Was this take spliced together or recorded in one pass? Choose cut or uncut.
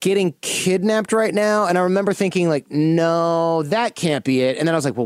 uncut